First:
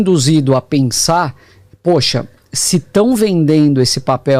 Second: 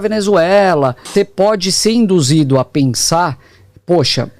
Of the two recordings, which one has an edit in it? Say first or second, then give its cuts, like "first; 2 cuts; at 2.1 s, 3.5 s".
second; 1 cut; at 1.1 s